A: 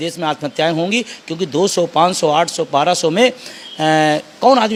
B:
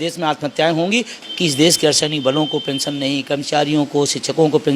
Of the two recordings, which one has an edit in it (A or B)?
B